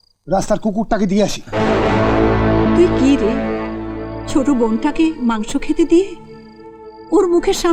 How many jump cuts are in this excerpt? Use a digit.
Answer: 0